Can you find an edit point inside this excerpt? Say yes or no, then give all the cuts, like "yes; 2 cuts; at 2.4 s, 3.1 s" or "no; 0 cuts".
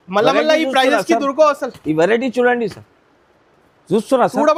no; 0 cuts